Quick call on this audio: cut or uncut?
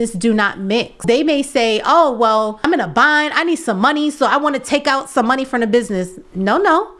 cut